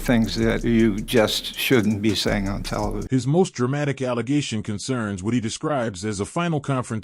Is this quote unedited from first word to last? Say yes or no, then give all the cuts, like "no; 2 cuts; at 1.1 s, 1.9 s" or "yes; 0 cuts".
yes; 0 cuts